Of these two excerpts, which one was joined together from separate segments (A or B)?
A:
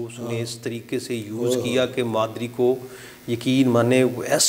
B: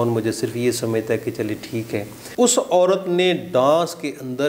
B